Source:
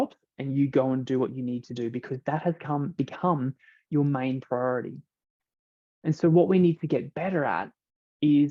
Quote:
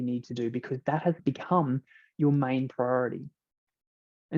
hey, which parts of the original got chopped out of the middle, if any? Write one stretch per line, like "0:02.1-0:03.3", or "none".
0:02.6-0:02.9

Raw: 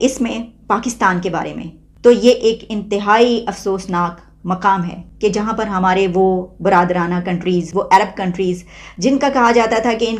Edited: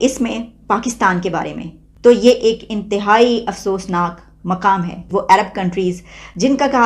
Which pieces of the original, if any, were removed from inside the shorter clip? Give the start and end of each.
0:05.1-0:07.7

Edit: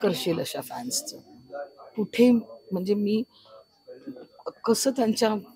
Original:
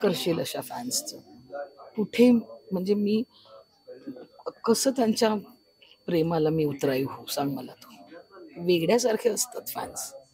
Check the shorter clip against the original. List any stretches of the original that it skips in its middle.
none

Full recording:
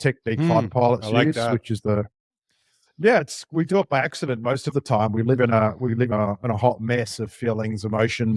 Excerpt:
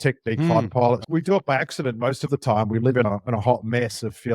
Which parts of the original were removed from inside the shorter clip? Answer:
0:01.0-0:03.5
0:05.5-0:06.2

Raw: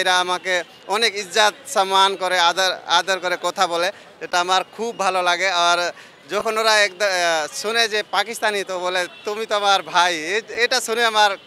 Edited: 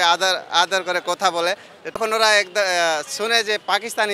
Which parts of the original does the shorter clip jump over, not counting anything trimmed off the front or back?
0:04.3-0:06.4

